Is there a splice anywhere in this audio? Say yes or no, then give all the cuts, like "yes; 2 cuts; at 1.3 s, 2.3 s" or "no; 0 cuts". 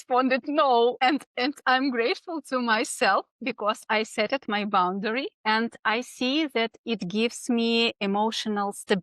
yes; 2 cuts; at 1.0 s, 5.3 s